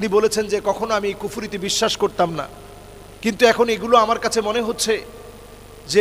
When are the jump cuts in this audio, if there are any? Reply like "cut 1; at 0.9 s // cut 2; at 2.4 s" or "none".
none